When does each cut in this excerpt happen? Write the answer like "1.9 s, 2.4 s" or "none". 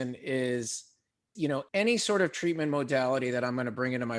1.6 s